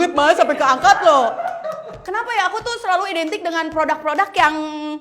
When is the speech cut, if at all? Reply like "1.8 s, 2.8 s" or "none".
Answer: 2.0 s